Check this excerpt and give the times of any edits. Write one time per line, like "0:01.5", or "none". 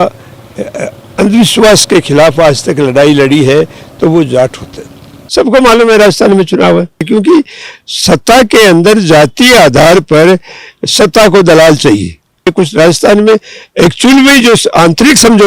0:05.2
0:07.1
0:12.5